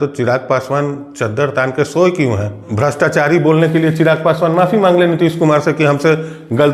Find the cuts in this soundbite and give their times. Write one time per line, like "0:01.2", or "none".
0:02.6

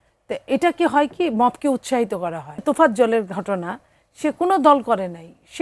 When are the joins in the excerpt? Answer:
0:02.6

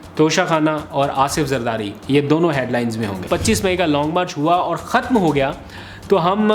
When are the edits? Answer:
0:03.3

